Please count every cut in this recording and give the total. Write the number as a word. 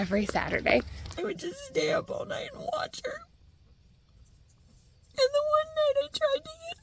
one